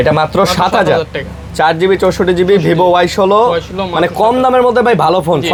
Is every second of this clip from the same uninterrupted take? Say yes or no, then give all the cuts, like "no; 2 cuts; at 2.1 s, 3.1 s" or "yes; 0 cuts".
yes; 0 cuts